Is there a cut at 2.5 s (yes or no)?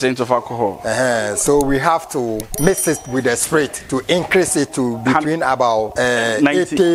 yes